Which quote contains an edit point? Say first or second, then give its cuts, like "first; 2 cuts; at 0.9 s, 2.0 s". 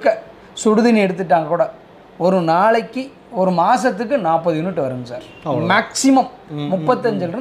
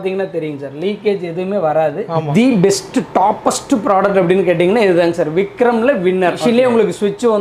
second; 2 cuts; at 2.3 s, 6.4 s